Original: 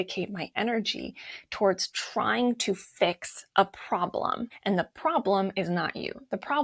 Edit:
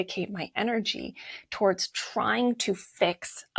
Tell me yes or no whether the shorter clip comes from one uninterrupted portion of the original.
yes